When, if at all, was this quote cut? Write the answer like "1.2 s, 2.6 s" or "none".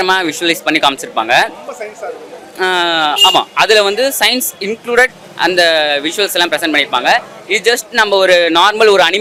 none